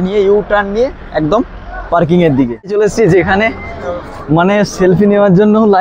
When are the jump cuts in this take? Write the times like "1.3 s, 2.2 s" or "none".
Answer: 2.7 s